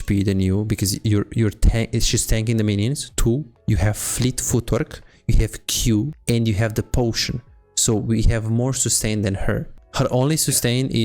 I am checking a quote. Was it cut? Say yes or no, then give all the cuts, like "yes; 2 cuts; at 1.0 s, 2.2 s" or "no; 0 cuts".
yes; 1 cut; at 6.2 s